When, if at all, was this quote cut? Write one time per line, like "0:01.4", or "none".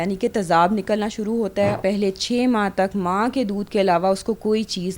0:01.8

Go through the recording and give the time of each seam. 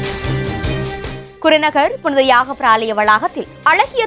0:01.2

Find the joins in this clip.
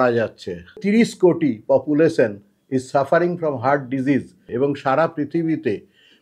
0:00.8
0:04.4

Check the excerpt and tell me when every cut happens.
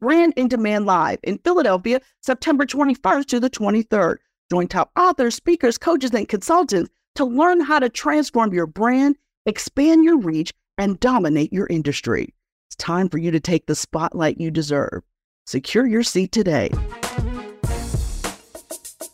0:16.7
0:18.4

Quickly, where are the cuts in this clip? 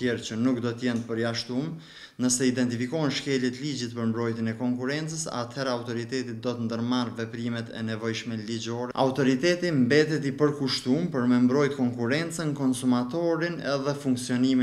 0:08.9

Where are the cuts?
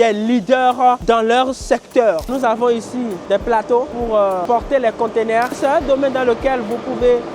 0:02.3
0:05.6

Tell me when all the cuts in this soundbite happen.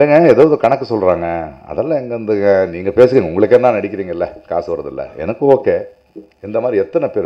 none

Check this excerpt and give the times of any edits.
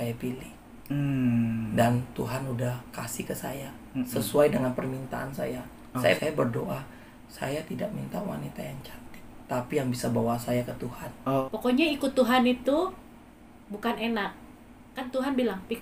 0:06.2
0:11.4

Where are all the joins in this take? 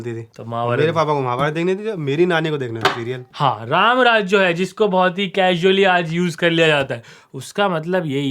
0:03.3

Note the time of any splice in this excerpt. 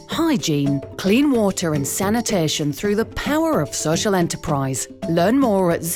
none

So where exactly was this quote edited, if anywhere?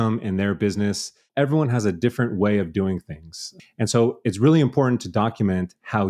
0:01.3

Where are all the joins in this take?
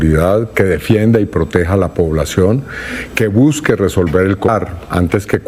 0:04.5

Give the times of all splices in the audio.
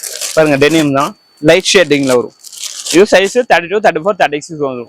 none

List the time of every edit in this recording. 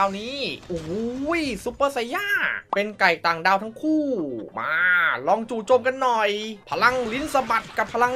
0:02.5
0:06.6

